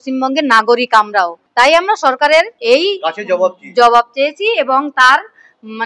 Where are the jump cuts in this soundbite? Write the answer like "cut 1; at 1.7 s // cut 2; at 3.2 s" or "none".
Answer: cut 1; at 1.4 s // cut 2; at 2.6 s